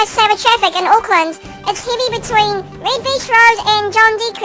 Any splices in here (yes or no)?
no